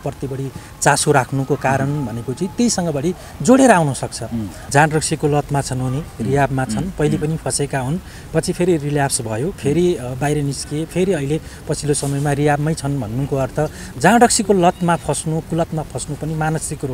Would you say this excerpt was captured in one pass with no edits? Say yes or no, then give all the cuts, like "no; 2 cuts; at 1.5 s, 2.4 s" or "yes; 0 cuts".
no; 1 cut; at 4.6 s